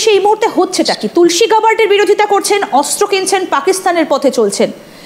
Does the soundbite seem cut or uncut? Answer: uncut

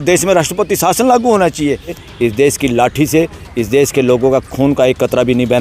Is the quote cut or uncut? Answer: cut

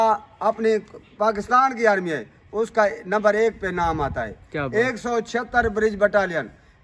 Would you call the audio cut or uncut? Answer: uncut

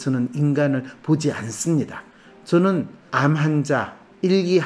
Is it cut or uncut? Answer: cut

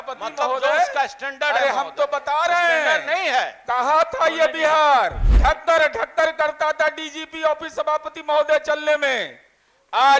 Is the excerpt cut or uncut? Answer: cut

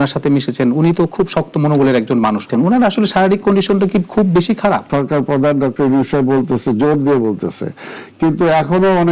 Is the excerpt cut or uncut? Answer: cut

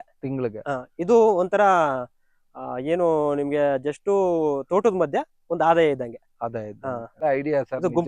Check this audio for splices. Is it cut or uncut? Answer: cut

